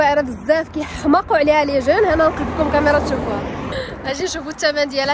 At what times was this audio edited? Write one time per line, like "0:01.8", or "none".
0:03.7